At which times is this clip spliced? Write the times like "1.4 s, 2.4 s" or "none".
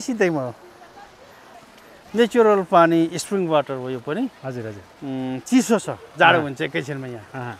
1.5 s